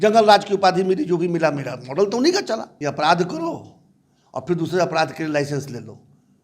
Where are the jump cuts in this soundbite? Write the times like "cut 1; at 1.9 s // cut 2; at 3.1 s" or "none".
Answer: cut 1; at 2.8 s